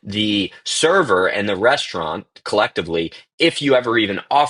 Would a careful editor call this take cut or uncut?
uncut